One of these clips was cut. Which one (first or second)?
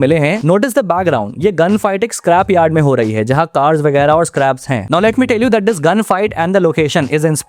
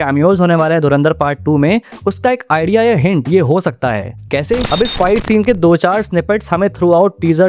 second